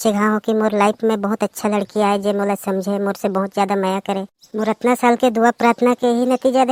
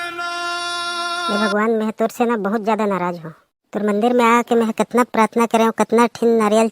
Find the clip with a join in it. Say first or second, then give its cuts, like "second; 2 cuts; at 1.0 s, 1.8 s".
second; 1 cut; at 1.3 s